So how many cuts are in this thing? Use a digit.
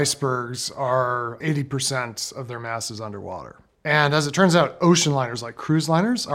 2